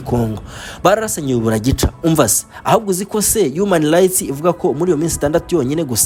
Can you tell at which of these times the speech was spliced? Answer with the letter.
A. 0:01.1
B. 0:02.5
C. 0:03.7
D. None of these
D